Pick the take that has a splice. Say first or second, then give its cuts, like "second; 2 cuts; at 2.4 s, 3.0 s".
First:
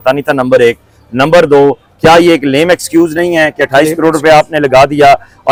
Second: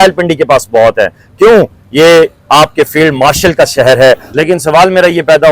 second; 1 cut; at 4.3 s